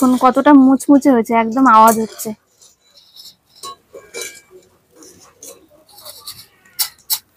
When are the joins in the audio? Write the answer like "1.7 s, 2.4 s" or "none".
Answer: none